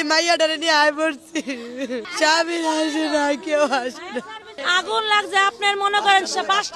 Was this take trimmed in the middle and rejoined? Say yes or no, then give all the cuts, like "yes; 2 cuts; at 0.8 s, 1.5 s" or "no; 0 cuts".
no; 0 cuts